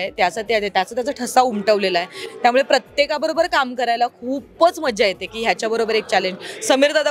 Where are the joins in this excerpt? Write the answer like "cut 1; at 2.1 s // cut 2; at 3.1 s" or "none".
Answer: none